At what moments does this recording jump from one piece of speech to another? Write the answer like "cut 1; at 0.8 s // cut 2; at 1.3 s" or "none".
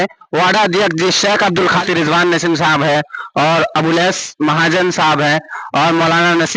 cut 1; at 1.8 s